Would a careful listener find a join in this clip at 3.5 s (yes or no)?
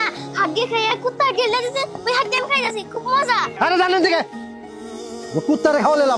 yes